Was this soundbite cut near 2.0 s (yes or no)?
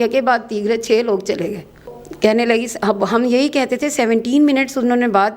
yes